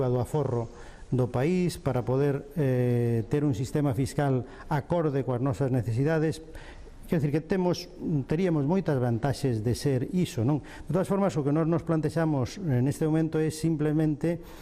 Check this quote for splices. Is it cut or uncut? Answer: cut